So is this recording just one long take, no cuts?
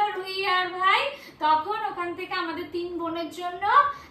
yes; 0 cuts

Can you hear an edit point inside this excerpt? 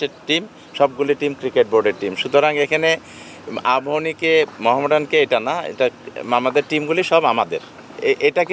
no; 0 cuts

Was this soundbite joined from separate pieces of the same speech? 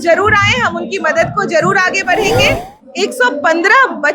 yes; 1 cut; at 2.8 s

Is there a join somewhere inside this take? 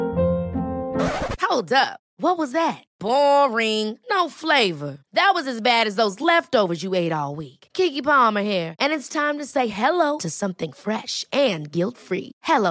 no; 0 cuts

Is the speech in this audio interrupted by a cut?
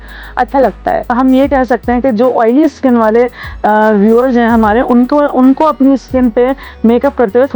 yes; 1 cut; at 1.1 s

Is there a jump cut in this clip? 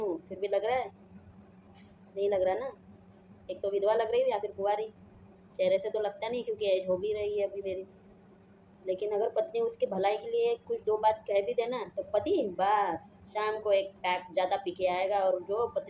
no; 0 cuts

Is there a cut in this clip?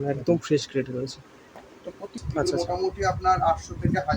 yes; 1 cut; at 2.2 s

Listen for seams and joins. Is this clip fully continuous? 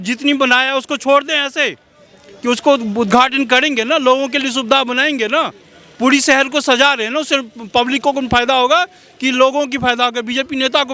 yes; 0 cuts

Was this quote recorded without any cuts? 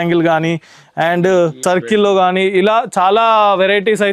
no; 1 cut; at 1.6 s

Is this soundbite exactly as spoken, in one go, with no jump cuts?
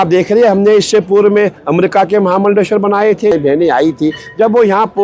no; 1 cut; at 3.3 s

